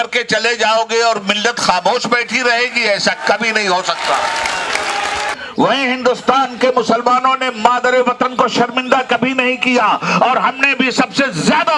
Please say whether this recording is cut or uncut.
cut